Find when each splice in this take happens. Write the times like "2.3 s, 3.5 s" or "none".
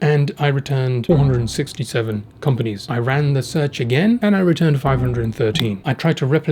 1.0 s, 2.8 s, 4.2 s